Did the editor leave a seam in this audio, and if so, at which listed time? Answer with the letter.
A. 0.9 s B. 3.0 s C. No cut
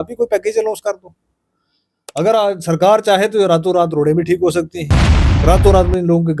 C